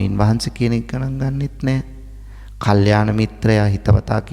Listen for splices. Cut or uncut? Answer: uncut